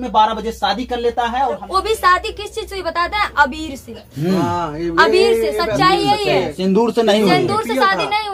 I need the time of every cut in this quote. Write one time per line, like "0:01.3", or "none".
0:01.6